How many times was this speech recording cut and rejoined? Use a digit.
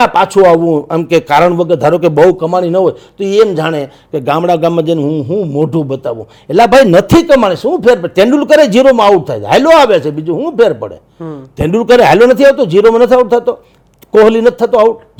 0